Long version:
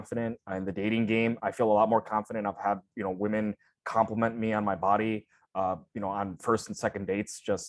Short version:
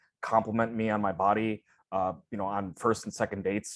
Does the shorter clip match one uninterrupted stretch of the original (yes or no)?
yes